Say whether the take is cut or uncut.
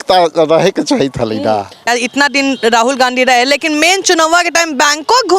cut